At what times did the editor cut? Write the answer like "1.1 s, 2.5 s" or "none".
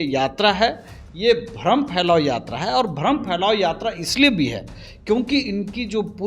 none

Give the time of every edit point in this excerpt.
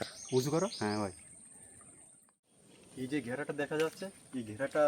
2.5 s

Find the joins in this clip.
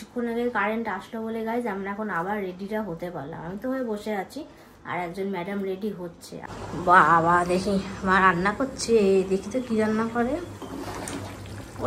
6.3 s

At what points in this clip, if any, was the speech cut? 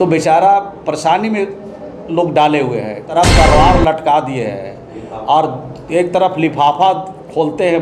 3.1 s

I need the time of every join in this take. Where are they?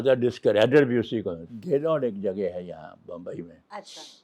1.5 s

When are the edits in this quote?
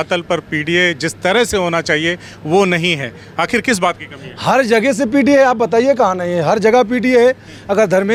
none

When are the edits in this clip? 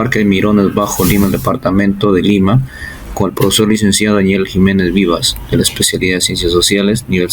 1.5 s

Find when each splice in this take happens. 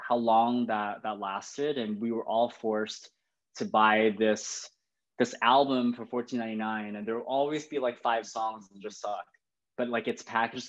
none

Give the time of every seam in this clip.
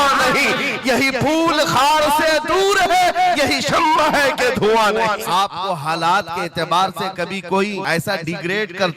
5.3 s, 7.8 s

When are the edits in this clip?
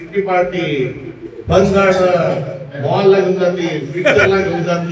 none

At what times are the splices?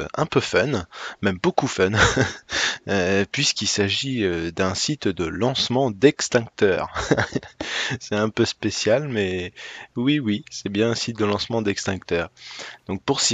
10.2 s

